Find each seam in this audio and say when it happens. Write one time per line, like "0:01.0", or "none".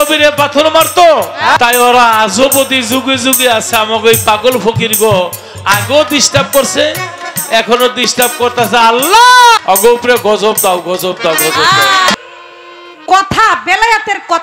0:01.6
0:09.6
0:12.1